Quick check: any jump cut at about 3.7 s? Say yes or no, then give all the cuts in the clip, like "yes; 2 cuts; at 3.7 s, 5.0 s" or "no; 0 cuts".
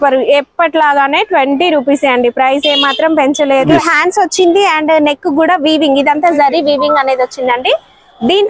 yes; 1 cut; at 3.7 s